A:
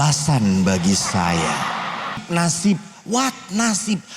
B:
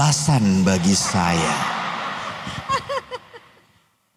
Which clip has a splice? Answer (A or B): A